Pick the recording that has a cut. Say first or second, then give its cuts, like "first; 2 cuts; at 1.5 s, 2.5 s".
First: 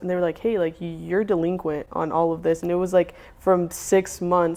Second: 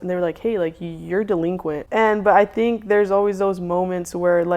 second; 1 cut; at 1.8 s